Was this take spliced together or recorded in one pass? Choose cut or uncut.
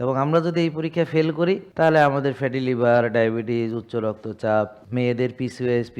cut